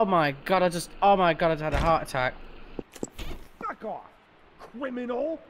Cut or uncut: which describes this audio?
cut